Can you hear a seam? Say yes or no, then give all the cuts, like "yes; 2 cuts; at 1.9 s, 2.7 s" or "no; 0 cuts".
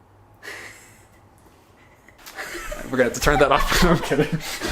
yes; 1 cut; at 2.1 s